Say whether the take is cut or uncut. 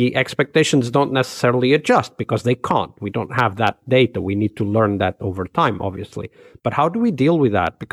uncut